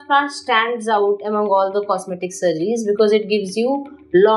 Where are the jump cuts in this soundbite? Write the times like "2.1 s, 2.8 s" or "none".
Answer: none